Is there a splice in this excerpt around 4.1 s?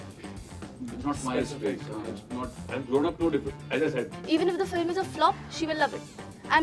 yes; 1 cut; at 4.1 s

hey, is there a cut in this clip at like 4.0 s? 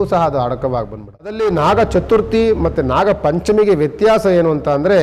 no; 1 cut; at 1.4 s

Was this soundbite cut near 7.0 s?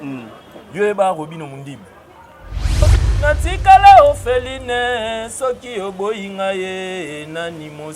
no; 1 cut; at 2.8 s

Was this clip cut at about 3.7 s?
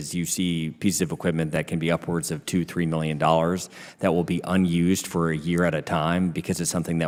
no; 0 cuts

